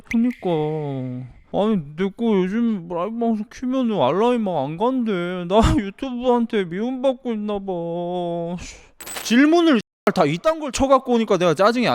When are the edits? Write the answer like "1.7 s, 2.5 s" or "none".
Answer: 9.0 s